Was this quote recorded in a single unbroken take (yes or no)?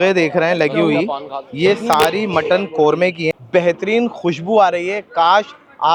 yes